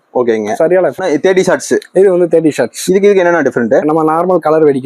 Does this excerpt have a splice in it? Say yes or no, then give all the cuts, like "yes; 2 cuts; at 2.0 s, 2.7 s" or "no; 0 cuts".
yes; 1 cut; at 0.9 s